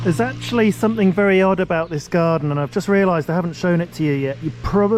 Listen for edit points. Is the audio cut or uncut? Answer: uncut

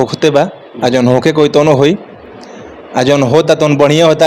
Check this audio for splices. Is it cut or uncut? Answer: uncut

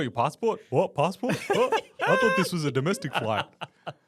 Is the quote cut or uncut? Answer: uncut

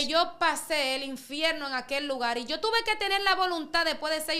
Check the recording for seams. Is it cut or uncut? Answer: uncut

